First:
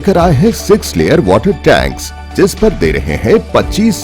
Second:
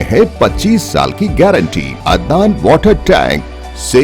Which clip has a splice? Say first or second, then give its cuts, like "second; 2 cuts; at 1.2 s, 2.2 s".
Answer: second; 1 cut; at 1.9 s